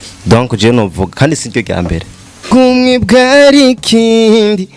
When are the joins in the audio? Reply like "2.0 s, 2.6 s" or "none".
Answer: 2.4 s